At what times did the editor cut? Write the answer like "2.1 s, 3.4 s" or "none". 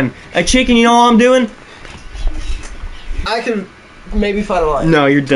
3.2 s